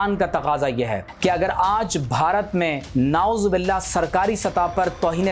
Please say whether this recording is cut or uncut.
cut